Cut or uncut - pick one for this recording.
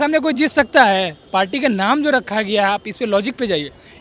uncut